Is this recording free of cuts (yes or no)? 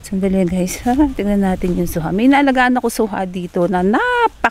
yes